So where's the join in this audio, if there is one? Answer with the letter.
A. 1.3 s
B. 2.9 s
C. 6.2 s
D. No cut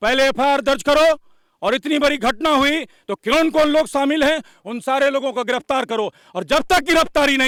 D